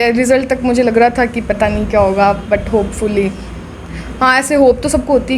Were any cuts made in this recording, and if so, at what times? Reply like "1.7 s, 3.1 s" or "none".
none